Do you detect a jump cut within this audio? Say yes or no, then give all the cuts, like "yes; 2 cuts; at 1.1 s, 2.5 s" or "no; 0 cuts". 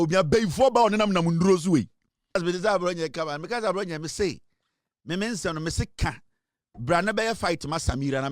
yes; 1 cut; at 2.4 s